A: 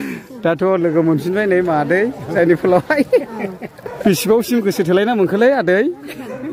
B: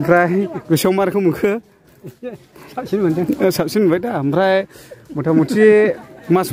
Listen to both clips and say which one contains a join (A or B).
A